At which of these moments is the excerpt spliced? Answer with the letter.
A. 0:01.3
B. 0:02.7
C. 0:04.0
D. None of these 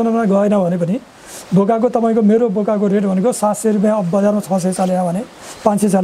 D